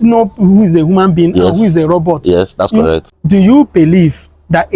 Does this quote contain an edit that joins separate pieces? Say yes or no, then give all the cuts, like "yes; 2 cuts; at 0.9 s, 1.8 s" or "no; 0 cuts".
yes; 1 cut; at 3.1 s